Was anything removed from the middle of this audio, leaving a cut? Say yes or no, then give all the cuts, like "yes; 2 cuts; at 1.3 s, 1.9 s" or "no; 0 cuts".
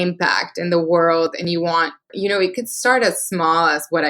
yes; 1 cut; at 2.1 s